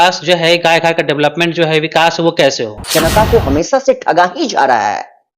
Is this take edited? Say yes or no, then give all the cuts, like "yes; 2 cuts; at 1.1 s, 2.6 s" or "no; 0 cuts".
yes; 1 cut; at 2.8 s